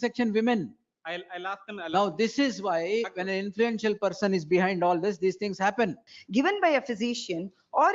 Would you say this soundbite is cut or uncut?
cut